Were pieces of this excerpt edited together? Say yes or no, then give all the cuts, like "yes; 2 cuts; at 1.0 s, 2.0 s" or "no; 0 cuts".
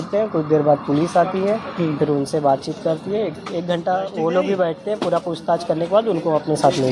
no; 0 cuts